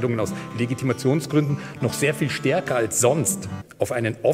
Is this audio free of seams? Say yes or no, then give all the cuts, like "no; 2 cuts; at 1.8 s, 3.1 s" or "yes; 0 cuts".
yes; 0 cuts